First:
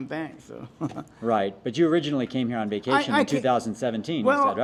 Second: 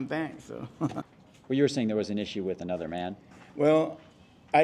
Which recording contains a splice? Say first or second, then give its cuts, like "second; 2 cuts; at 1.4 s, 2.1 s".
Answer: second; 1 cut; at 1.1 s